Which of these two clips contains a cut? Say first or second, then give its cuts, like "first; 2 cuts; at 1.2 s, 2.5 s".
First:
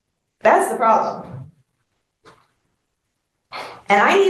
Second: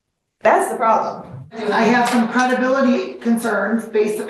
second; 1 cut; at 1.6 s